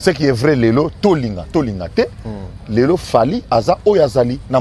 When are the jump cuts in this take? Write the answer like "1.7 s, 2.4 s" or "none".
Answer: none